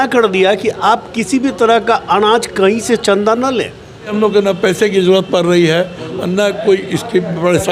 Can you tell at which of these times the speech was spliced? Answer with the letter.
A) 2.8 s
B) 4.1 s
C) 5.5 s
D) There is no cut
B